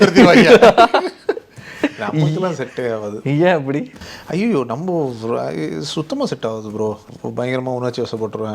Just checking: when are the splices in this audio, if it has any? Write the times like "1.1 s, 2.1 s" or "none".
7.1 s